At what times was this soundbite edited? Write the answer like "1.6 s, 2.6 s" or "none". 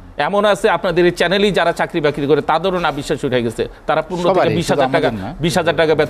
none